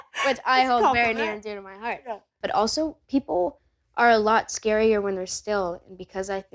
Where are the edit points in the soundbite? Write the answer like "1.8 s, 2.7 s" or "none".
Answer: 2.4 s